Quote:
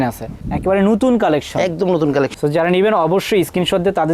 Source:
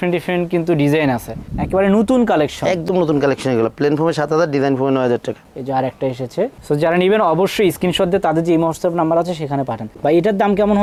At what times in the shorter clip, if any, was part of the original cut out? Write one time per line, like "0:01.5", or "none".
0:02.3